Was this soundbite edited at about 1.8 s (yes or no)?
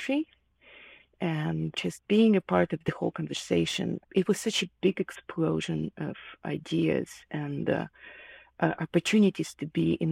yes